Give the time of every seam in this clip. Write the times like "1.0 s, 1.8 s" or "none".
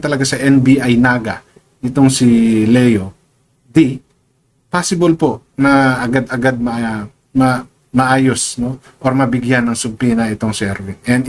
none